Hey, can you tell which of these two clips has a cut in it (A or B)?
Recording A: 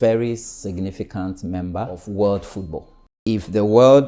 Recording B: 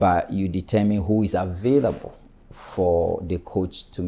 A